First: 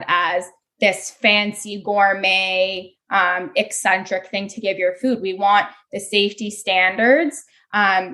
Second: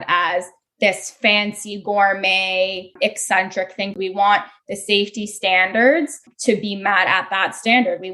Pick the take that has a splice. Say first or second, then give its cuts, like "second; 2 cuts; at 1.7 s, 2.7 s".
second; 3 cuts; at 2.9 s, 4.0 s, 6.3 s